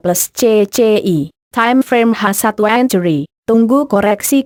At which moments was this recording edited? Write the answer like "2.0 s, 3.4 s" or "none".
none